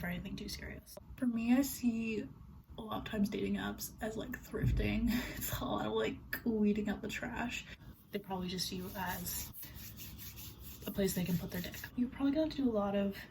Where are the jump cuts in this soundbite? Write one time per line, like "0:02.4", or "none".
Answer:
0:01.0
0:07.9
0:11.9